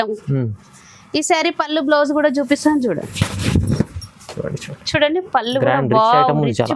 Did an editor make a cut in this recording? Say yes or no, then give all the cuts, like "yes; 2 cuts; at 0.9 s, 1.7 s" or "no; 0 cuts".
no; 0 cuts